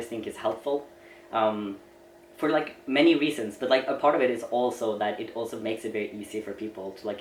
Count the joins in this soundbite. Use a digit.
0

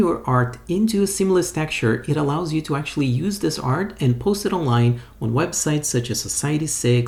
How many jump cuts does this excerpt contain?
0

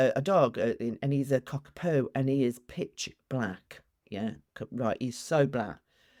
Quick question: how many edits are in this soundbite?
0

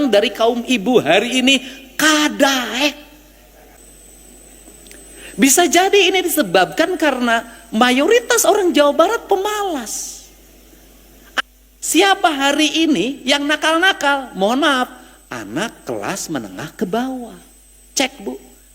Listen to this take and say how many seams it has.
2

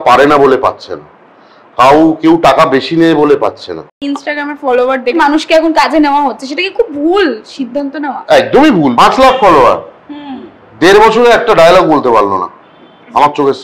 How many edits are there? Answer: 3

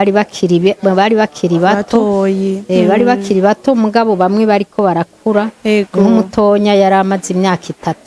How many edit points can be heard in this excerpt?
0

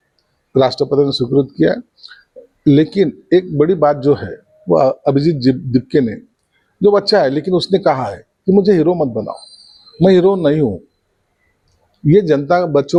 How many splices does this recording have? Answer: 0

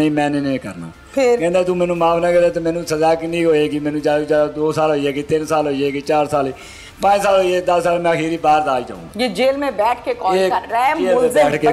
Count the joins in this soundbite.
1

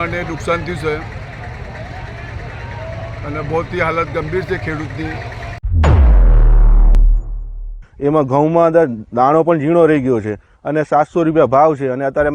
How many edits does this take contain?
2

